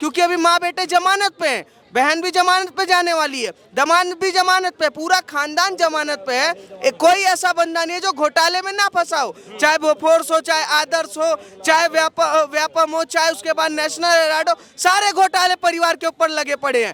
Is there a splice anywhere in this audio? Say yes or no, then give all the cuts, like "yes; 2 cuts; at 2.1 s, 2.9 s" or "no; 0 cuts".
no; 0 cuts